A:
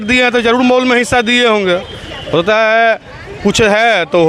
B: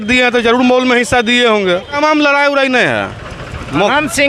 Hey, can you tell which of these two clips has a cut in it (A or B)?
B